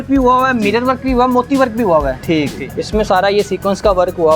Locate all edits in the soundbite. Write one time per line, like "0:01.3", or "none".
0:02.6